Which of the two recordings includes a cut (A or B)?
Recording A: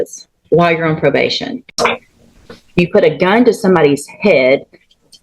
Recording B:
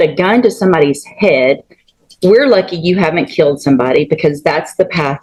A